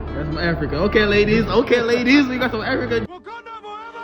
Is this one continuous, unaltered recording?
no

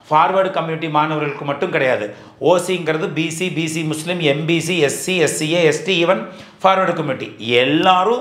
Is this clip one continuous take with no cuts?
yes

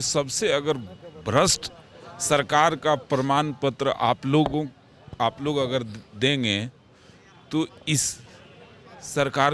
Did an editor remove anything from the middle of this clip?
no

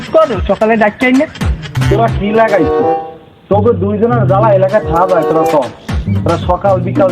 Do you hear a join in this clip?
yes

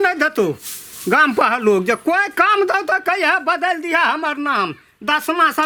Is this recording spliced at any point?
no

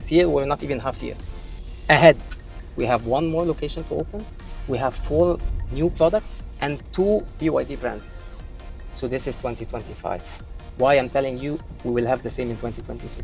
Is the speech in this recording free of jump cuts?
yes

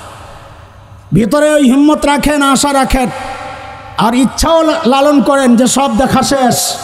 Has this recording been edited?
no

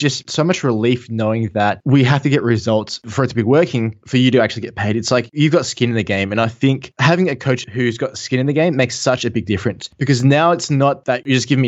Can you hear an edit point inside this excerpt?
no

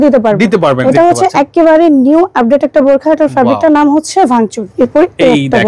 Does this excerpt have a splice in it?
yes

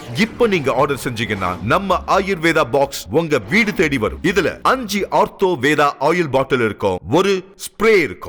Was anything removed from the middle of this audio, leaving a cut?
no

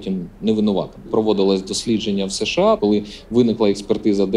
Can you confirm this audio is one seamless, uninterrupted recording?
yes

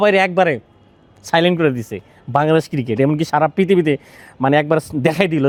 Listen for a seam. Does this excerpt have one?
no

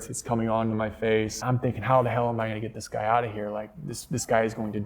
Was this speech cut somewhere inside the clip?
yes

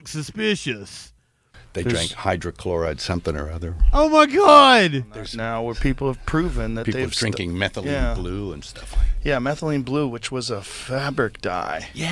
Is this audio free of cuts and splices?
no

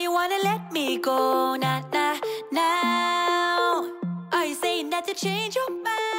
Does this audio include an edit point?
no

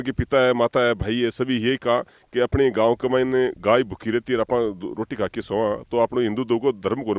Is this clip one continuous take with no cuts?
yes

